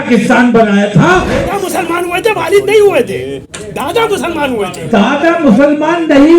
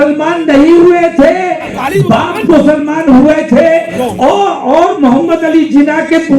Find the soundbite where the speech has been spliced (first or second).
first